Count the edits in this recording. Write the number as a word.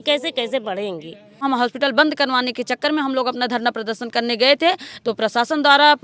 one